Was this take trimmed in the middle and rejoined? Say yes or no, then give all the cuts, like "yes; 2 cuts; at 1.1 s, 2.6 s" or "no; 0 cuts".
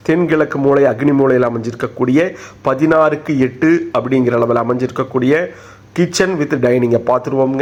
no; 0 cuts